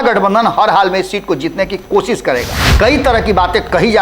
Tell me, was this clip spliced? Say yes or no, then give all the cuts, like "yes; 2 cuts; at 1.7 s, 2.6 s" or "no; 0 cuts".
yes; 1 cut; at 2.6 s